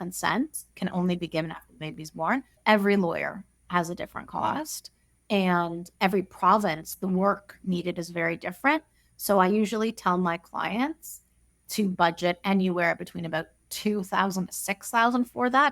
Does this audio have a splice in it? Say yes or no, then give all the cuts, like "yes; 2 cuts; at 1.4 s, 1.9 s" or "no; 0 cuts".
yes; 1 cut; at 2.5 s